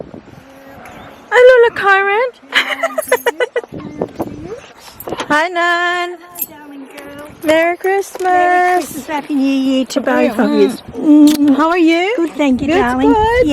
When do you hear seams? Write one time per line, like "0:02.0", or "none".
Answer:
0:04.9